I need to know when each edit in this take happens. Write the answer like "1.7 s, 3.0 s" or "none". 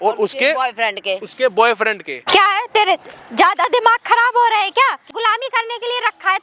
2.2 s, 5.0 s